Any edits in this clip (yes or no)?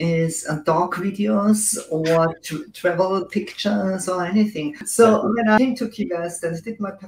yes